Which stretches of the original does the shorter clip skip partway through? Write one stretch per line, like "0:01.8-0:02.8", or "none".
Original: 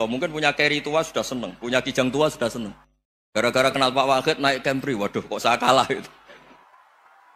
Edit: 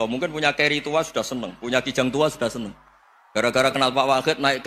none

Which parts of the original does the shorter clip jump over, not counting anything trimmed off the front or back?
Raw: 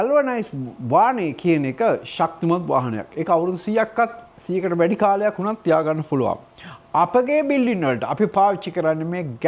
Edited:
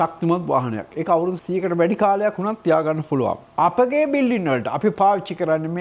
0:03.6-0:04.4
0:06.4-0:06.8

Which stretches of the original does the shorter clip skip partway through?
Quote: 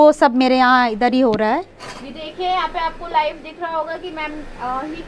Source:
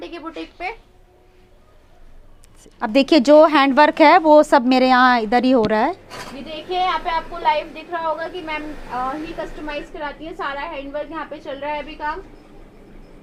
none

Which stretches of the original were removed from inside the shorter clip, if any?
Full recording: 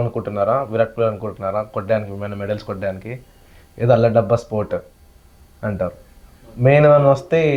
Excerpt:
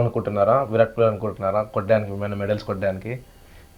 none

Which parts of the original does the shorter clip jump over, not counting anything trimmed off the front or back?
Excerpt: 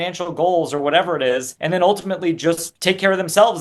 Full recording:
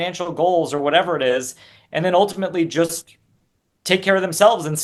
0:01.5-0:01.8
0:03.0-0:03.7

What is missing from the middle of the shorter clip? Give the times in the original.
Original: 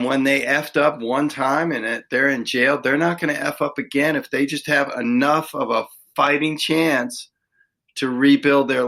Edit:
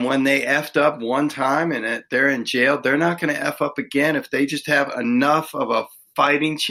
none

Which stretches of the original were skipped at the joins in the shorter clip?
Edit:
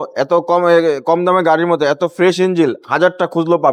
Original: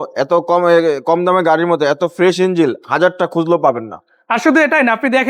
none

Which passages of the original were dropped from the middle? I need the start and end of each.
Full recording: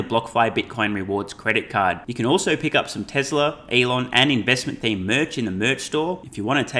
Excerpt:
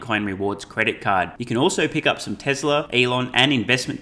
0:03.6-0:03.7

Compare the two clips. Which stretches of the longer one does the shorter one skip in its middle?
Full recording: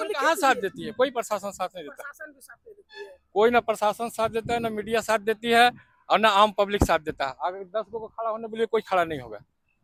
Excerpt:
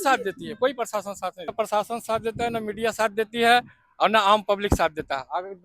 0:01.9-0:03.6

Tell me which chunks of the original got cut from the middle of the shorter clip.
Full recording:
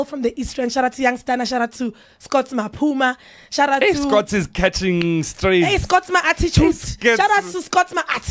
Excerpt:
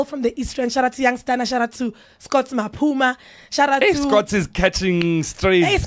none

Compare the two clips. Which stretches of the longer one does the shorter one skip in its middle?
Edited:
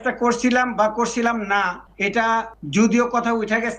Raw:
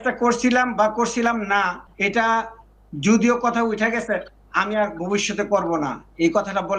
0:02.6-0:02.9

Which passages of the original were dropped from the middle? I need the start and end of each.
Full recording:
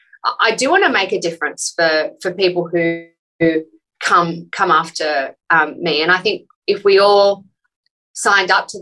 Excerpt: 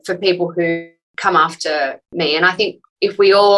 0:03.2-0:04.4
0:05.4-0:05.7

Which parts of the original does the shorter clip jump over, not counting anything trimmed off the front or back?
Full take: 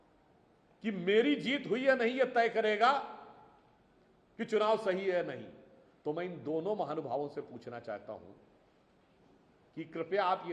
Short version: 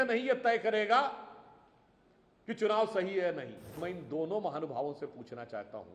0:05.7-0:06.2

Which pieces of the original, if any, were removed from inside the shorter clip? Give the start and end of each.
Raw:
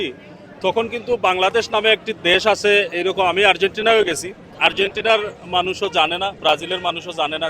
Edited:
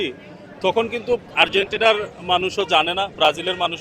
0:01.2-0:04.4

